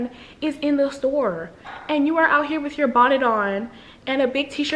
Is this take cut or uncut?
uncut